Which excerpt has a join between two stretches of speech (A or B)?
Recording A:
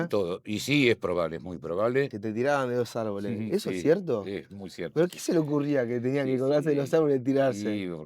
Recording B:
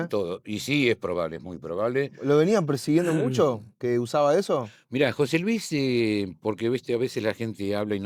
A